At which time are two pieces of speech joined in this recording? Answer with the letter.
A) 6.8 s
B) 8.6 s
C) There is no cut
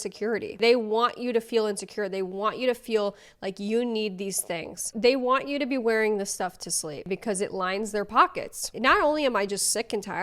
B